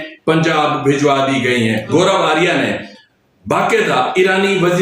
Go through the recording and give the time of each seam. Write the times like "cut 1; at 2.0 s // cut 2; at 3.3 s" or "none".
cut 1; at 1.9 s